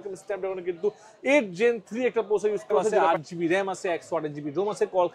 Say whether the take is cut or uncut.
cut